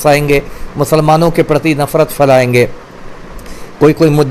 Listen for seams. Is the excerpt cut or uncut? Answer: uncut